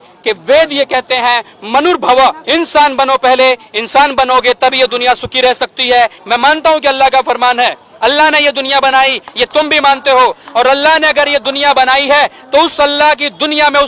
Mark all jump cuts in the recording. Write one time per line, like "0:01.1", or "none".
0:02.4
0:06.2